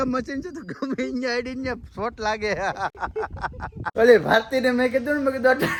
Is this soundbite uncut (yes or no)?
yes